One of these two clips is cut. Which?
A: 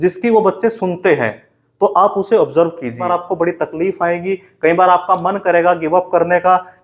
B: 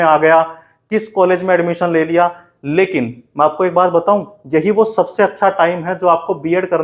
A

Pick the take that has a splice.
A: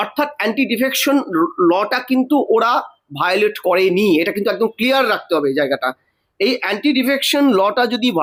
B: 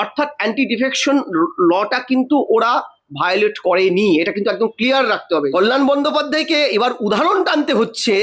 B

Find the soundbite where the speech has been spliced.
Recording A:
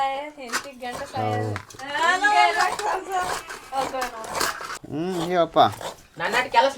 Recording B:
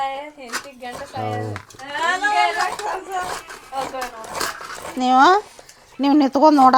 A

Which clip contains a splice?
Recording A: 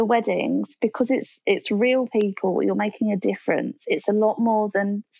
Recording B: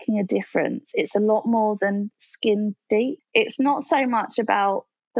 B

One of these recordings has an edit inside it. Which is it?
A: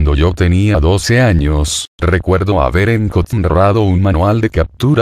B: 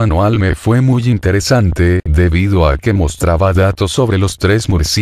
A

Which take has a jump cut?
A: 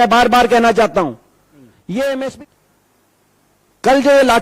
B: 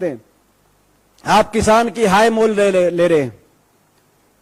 A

